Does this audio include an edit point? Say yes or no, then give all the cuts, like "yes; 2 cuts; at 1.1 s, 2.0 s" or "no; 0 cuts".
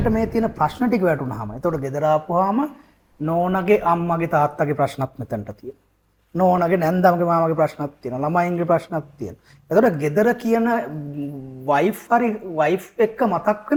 no; 0 cuts